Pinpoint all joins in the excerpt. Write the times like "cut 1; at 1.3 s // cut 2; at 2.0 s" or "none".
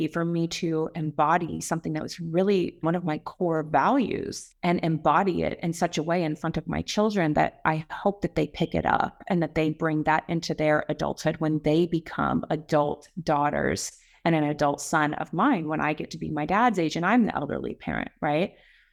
none